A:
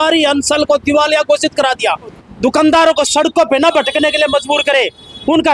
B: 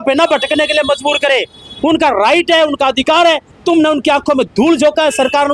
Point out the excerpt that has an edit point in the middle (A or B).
A